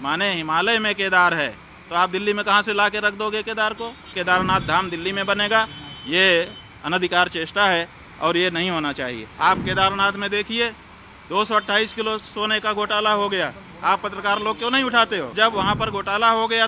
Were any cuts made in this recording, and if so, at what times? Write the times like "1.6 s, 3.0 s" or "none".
4.1 s, 9.2 s, 15.3 s